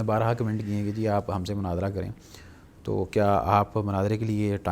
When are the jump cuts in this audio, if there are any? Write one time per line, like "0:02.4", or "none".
none